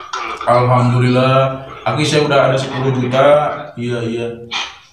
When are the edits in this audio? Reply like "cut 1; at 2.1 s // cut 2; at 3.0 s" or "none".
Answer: none

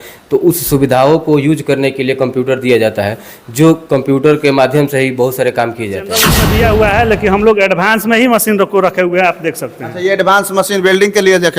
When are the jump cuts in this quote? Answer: cut 1; at 6.4 s

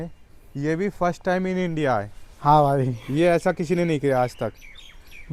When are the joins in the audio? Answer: none

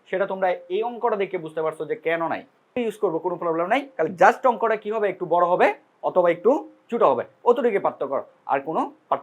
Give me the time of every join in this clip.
cut 1; at 2.7 s

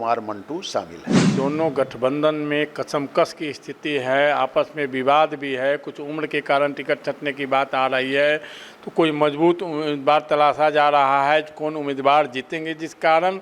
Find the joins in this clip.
cut 1; at 1.3 s

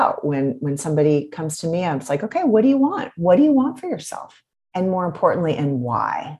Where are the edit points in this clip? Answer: none

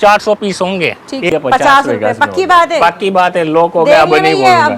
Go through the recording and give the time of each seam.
cut 1; at 1.3 s

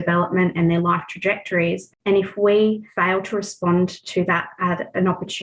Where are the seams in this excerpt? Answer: cut 1; at 1.9 s // cut 2; at 2.9 s

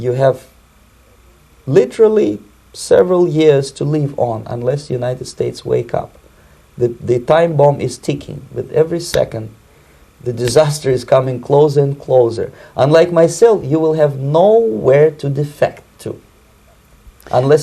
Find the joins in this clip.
none

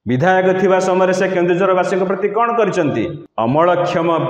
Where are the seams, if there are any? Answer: cut 1; at 3.2 s

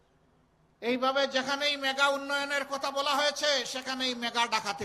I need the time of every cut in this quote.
none

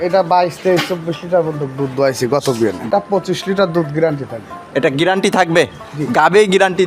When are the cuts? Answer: cut 1; at 2.9 s

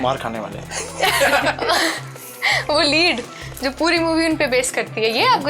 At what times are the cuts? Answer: none

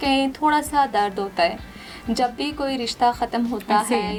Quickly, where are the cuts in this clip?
none

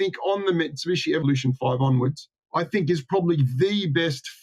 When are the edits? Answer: cut 1; at 1.2 s

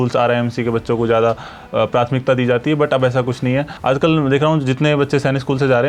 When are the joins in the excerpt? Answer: cut 1; at 3.7 s

